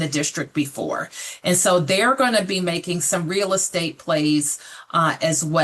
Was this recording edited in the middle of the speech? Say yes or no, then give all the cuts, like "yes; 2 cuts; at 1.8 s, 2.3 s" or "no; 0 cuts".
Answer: no; 0 cuts